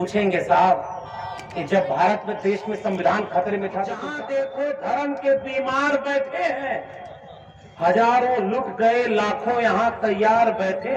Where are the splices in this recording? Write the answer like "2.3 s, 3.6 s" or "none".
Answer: 4.1 s